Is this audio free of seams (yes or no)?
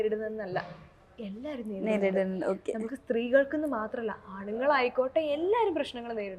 yes